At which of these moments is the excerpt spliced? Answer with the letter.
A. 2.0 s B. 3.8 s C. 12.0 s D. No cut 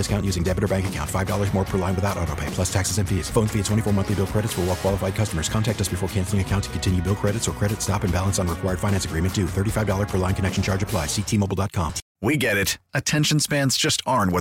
C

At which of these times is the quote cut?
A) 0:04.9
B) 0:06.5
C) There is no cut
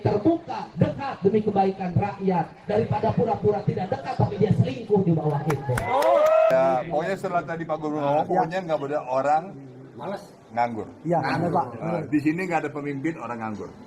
B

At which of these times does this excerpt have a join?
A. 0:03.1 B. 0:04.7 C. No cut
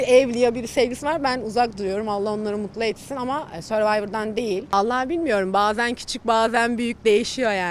B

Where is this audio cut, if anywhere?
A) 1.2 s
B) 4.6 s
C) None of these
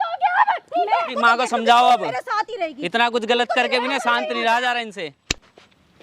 A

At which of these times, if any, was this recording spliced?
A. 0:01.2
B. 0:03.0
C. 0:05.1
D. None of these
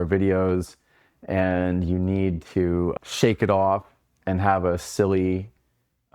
B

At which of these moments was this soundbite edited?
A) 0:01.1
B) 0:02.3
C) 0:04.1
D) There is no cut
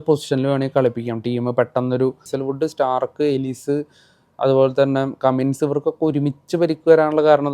B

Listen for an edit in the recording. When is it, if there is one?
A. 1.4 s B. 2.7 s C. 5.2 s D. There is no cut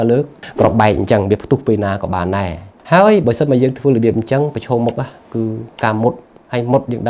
B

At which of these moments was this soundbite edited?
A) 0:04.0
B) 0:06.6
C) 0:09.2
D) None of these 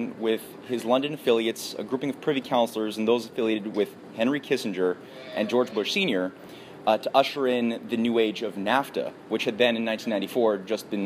A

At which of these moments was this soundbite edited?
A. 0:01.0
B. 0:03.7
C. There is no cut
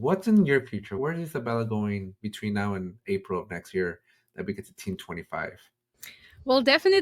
A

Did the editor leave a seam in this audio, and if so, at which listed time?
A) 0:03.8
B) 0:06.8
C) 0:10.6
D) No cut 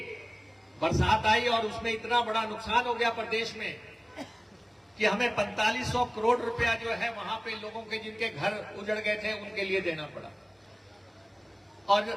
C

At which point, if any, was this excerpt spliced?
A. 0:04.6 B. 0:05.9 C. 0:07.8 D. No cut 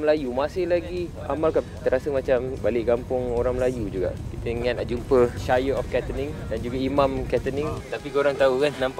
C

